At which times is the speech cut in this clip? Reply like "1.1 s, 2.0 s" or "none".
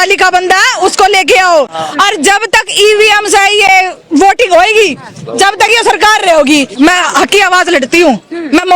6.7 s